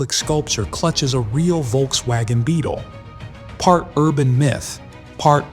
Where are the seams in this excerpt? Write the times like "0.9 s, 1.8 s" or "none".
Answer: none